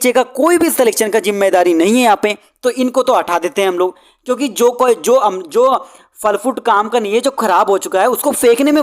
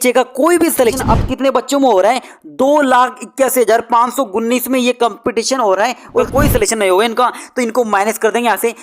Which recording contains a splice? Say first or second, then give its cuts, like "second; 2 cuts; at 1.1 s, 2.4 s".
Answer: second; 2 cuts; at 1.0 s, 6.3 s